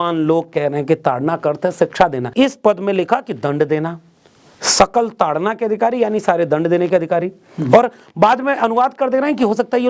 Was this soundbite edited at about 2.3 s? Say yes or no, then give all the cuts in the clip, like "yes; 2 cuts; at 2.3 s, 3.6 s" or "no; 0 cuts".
yes; 1 cut; at 2.3 s